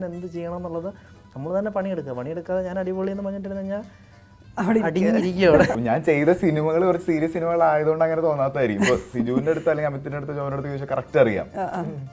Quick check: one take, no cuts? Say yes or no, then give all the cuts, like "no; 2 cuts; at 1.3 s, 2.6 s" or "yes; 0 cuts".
no; 1 cut; at 5.7 s